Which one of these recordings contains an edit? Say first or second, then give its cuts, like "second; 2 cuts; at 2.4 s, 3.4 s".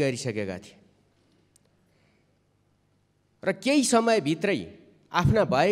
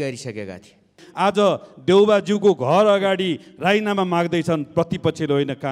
second; 1 cut; at 1.0 s